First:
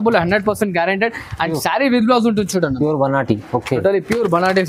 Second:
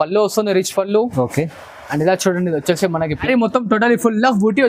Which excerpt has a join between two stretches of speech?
second; 1 cut; at 3.2 s

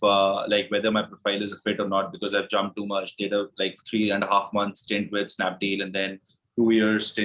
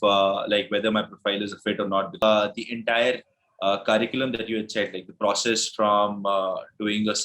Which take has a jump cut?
second; 1 cut; at 2.2 s

